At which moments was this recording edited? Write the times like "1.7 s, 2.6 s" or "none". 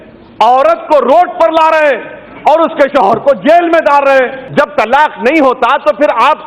4.4 s